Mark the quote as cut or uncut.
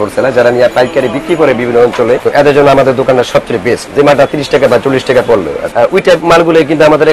cut